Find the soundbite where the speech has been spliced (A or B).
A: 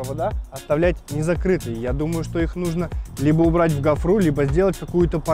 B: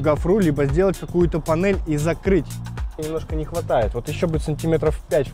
B